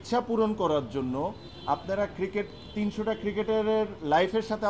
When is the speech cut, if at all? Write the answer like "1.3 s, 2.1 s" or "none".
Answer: none